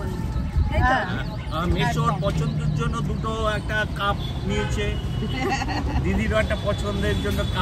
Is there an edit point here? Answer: no; 0 cuts

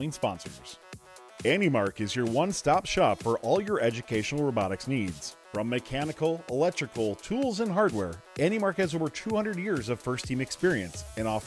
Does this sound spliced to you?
yes; 1 cut; at 0.9 s

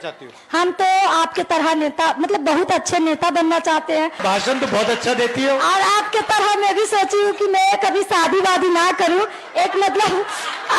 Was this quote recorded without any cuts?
no; 1 cut; at 4.2 s

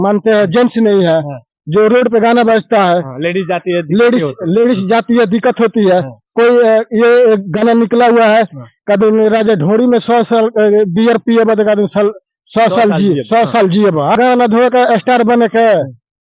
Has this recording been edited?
no; 0 cuts

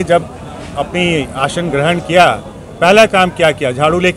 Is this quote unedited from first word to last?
yes; 0 cuts

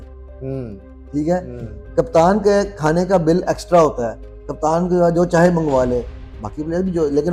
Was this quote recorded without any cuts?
yes; 0 cuts

